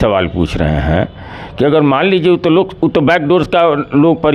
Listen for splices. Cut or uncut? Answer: uncut